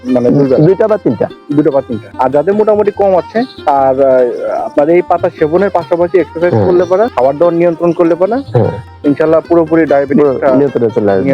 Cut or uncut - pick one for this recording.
cut